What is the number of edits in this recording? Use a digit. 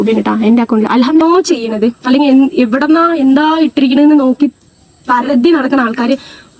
1